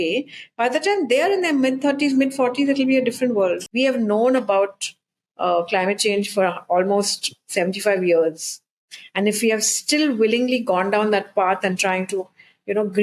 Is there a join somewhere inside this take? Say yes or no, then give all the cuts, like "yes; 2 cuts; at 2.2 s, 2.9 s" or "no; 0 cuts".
yes; 1 cut; at 3.6 s